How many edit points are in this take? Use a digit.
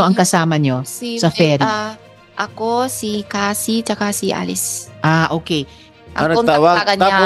1